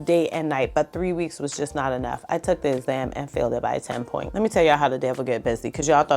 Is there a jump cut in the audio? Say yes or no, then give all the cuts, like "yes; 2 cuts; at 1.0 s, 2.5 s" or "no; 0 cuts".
yes; 1 cut; at 4.3 s